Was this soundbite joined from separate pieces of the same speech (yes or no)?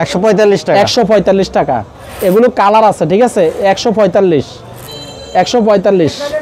no